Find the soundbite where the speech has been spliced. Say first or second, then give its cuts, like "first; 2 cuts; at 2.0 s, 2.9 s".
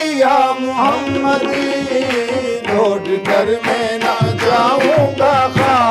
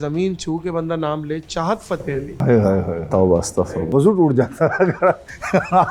second; 2 cuts; at 2.3 s, 3.9 s